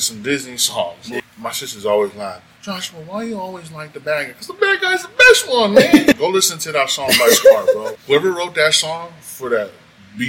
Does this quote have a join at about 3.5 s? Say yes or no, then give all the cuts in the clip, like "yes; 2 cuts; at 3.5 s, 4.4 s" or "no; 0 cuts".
no; 3 cuts; at 1.1 s, 6.2 s, 7.9 s